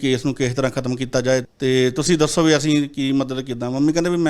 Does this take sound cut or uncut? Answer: cut